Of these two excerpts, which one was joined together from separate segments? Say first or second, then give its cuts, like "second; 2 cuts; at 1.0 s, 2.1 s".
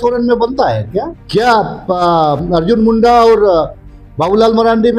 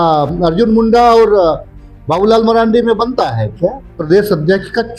second; 1 cut; at 3.9 s